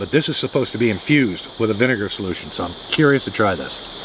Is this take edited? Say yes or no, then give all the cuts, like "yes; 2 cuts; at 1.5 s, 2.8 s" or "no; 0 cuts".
no; 0 cuts